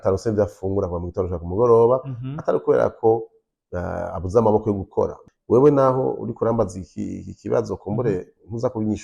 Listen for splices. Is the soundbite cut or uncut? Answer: cut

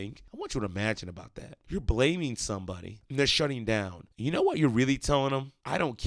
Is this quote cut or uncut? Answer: uncut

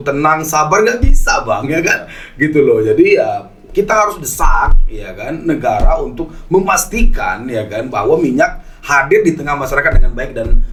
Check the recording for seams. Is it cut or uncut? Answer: uncut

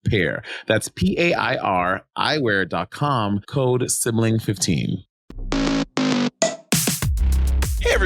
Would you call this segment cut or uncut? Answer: uncut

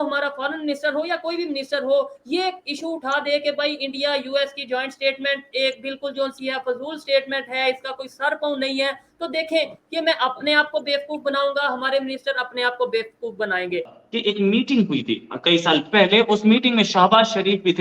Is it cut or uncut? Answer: cut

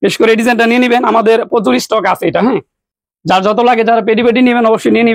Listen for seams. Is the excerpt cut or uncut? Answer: uncut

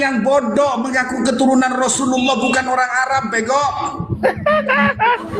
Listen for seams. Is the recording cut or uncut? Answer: cut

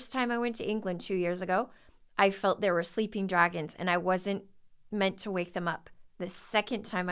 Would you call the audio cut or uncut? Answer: uncut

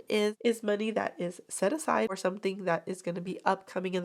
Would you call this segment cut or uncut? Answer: cut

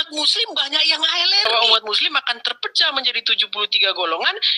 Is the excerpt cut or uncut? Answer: cut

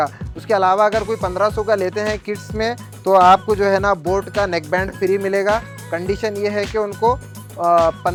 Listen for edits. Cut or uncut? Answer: uncut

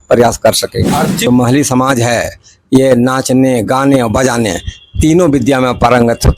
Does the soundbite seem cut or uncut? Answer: cut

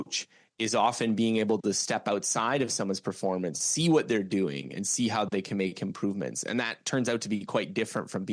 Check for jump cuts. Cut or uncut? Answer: uncut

